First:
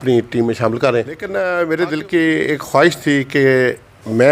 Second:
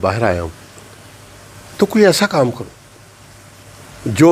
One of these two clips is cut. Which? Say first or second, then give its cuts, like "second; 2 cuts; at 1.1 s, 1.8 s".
first; 1 cut; at 1.3 s